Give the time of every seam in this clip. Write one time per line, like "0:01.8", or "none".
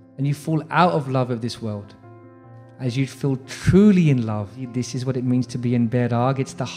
0:04.6